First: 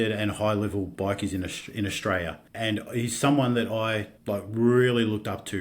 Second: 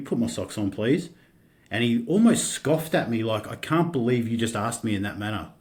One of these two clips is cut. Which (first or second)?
first